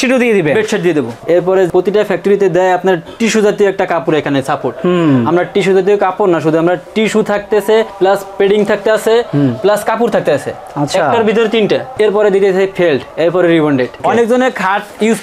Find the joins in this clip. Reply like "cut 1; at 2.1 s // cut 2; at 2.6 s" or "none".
cut 1; at 1.2 s // cut 2; at 14.0 s